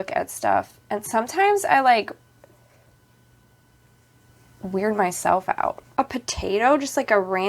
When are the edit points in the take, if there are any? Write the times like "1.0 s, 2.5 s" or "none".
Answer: 5.9 s